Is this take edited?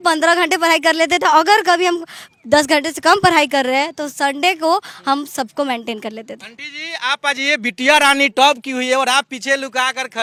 no; 0 cuts

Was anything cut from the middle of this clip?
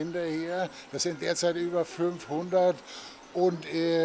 no; 0 cuts

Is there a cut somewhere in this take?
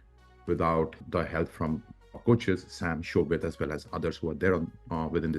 no; 0 cuts

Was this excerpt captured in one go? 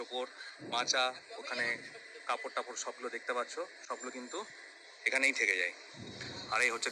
yes; 0 cuts

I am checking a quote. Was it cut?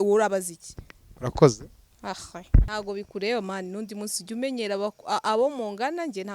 yes; 1 cut; at 2.7 s

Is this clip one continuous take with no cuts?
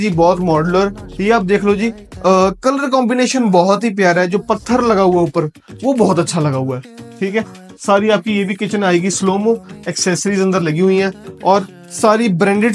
yes; 0 cuts

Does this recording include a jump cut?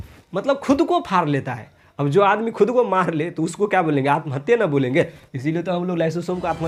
no; 0 cuts

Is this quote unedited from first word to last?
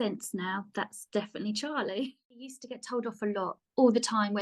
no; 1 cut; at 2.6 s

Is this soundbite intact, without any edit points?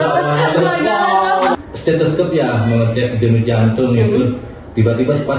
no; 1 cut; at 1.6 s

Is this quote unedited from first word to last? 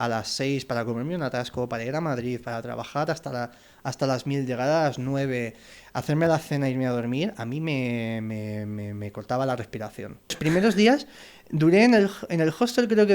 no; 1 cut; at 10.4 s

